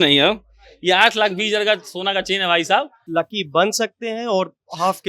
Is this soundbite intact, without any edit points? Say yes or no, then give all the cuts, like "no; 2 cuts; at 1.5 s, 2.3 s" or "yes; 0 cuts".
no; 1 cut; at 3.0 s